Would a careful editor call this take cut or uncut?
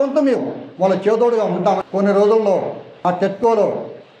cut